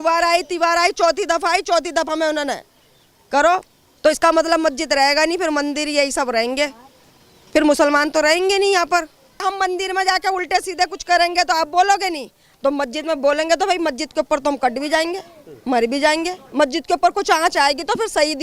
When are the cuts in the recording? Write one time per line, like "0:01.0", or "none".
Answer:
0:09.4
0:16.4